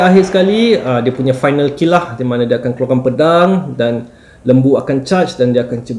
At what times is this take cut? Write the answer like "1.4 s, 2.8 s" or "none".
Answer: none